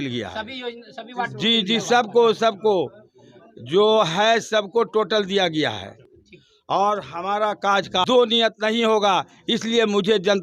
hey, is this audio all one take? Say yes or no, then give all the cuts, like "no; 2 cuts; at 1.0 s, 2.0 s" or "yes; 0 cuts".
yes; 0 cuts